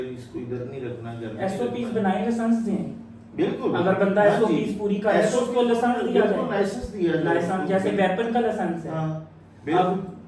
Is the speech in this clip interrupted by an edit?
no; 0 cuts

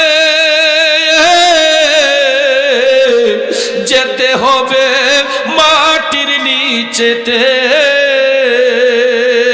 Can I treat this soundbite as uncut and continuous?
yes; 0 cuts

